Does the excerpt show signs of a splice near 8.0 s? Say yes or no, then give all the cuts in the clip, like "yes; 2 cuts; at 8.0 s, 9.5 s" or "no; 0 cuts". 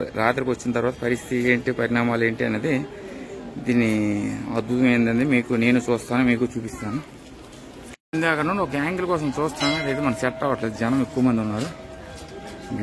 yes; 1 cut; at 8.0 s